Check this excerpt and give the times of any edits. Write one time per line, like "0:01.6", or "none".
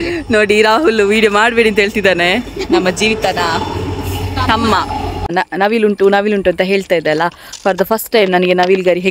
0:05.3